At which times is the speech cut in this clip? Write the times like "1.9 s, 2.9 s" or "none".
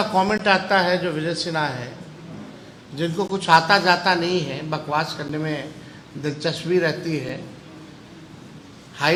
none